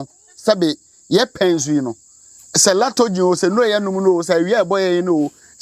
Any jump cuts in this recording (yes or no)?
no